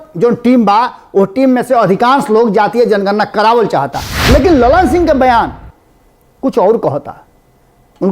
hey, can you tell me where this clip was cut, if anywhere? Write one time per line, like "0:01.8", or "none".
0:04.1